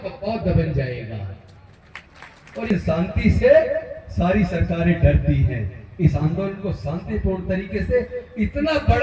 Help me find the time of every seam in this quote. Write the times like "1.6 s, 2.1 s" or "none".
2.7 s